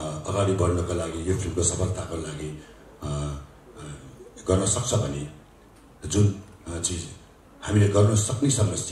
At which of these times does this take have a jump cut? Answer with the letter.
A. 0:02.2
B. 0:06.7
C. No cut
C